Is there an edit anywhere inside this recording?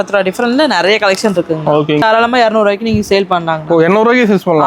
yes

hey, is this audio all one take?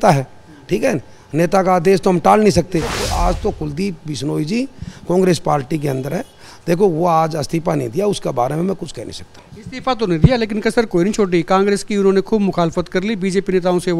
no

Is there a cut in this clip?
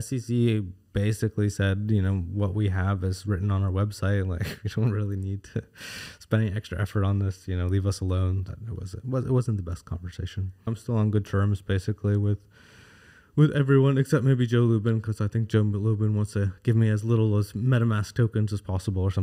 yes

